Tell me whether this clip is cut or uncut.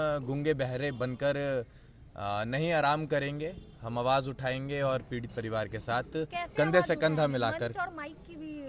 uncut